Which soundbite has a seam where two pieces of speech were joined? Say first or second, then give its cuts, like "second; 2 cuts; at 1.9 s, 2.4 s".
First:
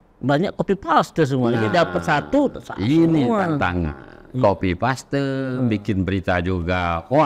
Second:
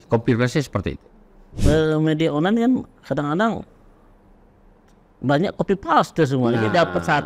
second; 1 cut; at 1.5 s